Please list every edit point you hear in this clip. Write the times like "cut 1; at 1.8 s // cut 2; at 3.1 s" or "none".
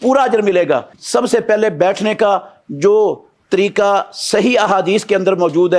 cut 1; at 0.9 s